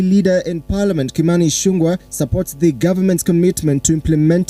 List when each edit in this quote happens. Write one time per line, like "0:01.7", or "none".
0:01.2